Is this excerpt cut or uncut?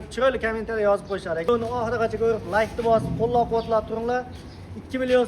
cut